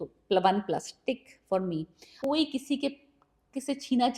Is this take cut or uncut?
cut